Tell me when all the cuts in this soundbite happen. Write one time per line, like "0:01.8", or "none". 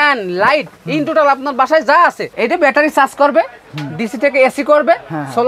0:02.3